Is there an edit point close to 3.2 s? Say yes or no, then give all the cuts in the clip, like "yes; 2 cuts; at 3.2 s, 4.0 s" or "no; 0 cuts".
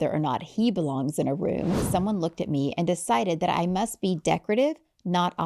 no; 1 cut; at 1.8 s